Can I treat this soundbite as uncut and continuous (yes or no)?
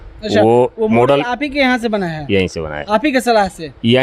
yes